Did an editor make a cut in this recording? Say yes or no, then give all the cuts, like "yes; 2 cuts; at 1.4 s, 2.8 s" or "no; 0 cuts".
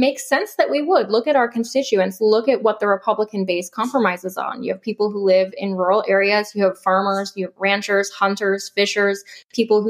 no; 0 cuts